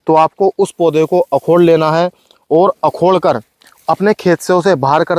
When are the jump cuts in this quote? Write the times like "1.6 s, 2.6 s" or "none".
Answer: none